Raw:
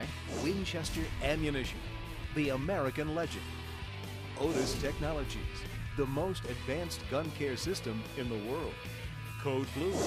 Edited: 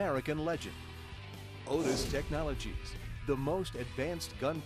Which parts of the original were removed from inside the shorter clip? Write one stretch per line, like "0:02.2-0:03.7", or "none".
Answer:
none